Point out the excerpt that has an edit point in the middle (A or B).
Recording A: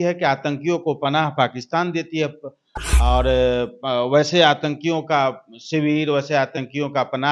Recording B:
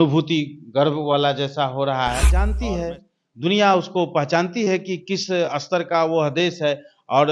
B